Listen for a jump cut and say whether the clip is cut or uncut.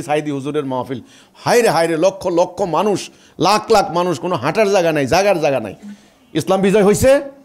uncut